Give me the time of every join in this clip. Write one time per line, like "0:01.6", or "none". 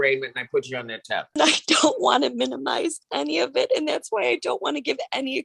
0:01.4